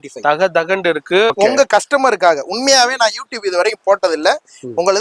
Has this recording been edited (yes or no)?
yes